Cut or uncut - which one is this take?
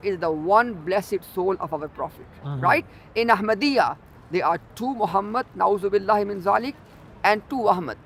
uncut